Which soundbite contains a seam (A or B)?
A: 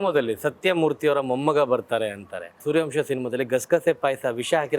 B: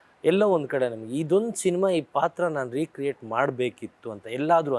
A